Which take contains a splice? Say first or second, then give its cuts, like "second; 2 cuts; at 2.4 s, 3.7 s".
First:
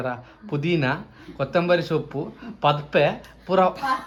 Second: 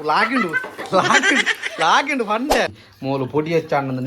second; 1 cut; at 2.8 s